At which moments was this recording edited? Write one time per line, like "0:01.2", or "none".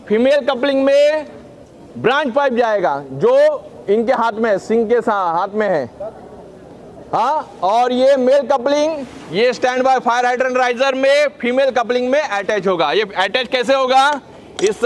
none